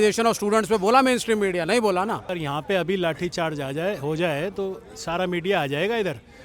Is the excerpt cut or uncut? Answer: cut